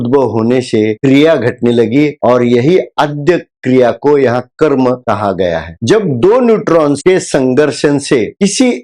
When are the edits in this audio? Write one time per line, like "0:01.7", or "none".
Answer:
0:00.9
0:07.0